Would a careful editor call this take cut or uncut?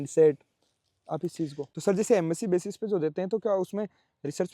cut